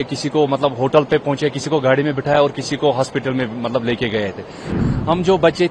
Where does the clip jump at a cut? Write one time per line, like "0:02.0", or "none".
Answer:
0:04.7